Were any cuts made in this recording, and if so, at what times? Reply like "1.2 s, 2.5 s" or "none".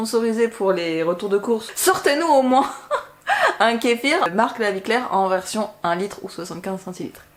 1.7 s, 4.3 s